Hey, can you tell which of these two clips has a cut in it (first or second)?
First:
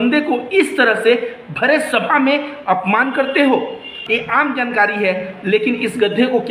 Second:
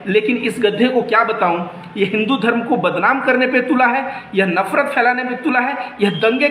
first